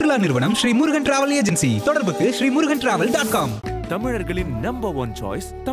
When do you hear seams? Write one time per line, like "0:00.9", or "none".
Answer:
none